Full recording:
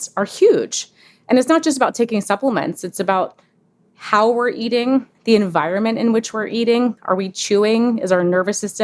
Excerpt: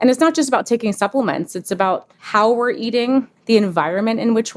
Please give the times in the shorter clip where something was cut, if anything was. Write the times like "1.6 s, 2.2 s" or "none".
2.1 s